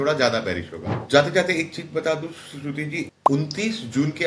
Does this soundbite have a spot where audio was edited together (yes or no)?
yes